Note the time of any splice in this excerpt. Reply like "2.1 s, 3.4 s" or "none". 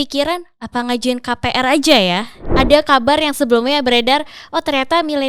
2.4 s